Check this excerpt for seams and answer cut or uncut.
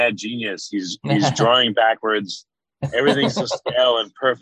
uncut